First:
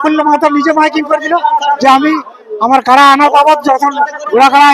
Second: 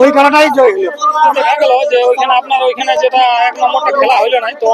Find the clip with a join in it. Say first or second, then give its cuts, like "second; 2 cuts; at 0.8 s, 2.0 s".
second; 1 cut; at 1.3 s